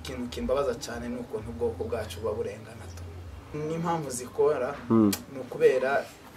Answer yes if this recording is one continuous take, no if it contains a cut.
no